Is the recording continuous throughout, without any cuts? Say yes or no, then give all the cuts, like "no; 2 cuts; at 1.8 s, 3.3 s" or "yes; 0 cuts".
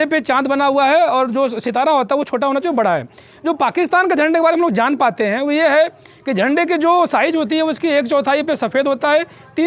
yes; 0 cuts